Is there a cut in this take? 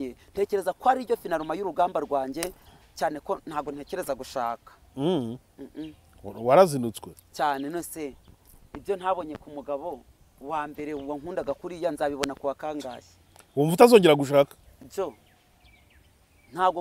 no; 0 cuts

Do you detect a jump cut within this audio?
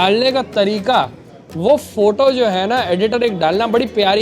no; 0 cuts

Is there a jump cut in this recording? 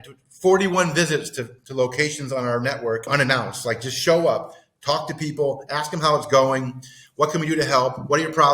yes; 1 cut; at 3.1 s

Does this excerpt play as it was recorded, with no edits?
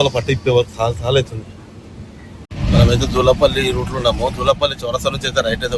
no; 1 cut; at 2.4 s

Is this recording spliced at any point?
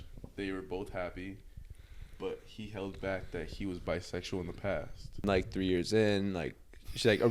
yes; 1 cut; at 5.2 s

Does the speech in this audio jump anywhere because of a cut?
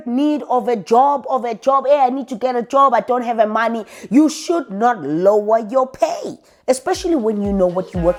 no; 0 cuts

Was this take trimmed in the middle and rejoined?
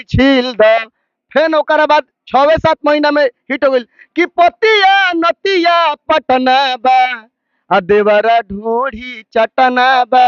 no; 0 cuts

